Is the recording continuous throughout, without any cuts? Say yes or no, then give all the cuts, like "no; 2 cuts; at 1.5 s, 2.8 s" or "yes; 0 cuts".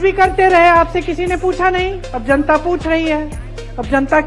yes; 0 cuts